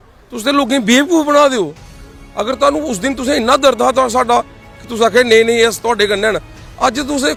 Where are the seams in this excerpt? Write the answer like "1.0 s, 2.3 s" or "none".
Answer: none